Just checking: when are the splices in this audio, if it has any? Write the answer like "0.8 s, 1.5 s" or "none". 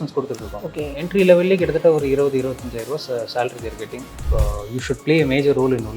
4.2 s